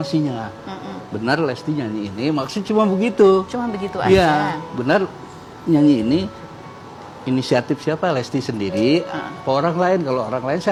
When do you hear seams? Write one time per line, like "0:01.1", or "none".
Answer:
none

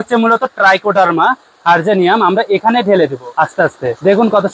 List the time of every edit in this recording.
0:03.5

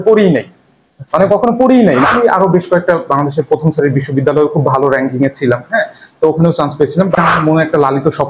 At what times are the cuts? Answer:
0:02.1
0:07.2

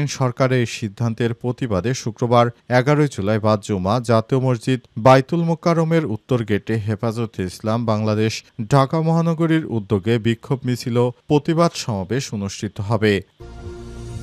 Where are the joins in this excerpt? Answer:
0:13.3

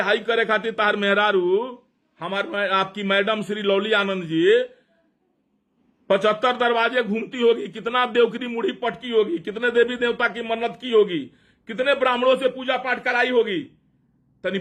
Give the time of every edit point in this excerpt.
none

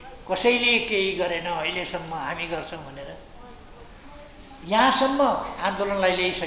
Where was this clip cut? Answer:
none

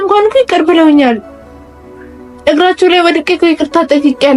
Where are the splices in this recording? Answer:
none

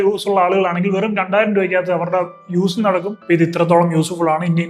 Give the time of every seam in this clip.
0:03.1

